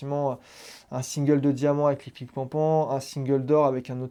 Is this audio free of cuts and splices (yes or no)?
yes